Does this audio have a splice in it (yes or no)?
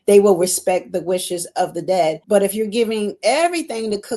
yes